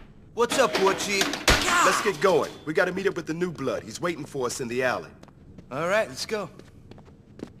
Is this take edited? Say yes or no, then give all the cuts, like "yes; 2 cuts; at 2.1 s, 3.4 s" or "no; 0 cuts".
no; 0 cuts